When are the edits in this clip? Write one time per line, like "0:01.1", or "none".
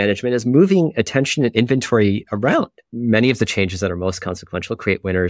0:02.8